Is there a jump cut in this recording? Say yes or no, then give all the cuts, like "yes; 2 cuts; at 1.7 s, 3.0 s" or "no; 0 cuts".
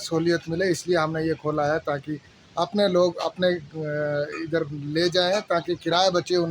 no; 0 cuts